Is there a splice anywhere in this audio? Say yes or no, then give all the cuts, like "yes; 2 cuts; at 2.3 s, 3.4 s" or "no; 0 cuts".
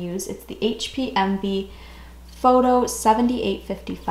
no; 0 cuts